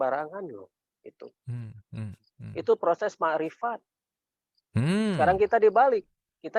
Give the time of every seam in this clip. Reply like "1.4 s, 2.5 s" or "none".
none